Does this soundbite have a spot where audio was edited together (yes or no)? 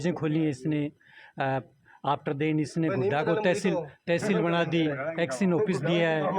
no